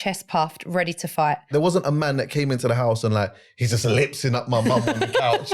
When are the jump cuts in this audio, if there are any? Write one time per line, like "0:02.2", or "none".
0:01.5